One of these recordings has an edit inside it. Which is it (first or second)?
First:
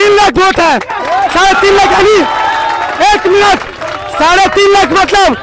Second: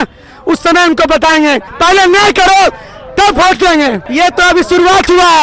second